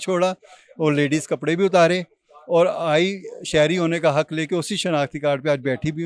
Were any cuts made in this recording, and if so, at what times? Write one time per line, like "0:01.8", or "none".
none